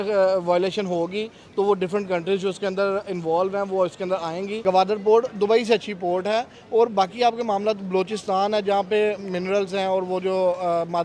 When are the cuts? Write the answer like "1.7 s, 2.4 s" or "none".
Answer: 4.6 s